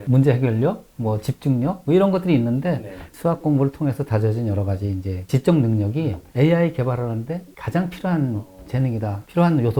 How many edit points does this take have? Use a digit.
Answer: 1